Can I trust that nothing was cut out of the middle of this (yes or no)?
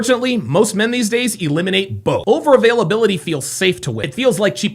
no